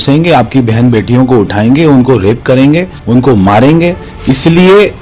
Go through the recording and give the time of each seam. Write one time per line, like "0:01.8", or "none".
0:02.9
0:04.1